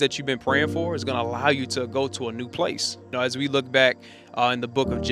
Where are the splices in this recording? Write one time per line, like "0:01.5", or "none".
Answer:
0:03.1